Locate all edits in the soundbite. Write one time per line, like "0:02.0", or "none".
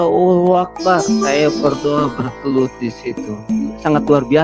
0:01.1
0:03.5